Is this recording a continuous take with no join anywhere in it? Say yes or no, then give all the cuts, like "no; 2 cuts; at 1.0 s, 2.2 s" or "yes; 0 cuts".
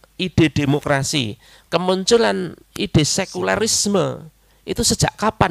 yes; 0 cuts